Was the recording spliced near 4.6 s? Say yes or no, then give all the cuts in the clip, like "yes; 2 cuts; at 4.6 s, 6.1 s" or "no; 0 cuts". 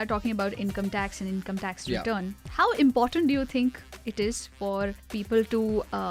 no; 0 cuts